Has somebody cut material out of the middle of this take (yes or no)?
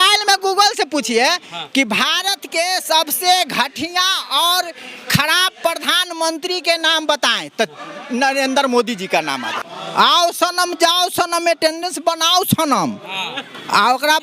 yes